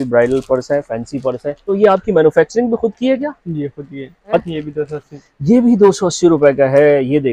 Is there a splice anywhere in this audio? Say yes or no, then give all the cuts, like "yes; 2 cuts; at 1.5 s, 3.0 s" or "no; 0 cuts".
yes; 2 cuts; at 1.6 s, 4.5 s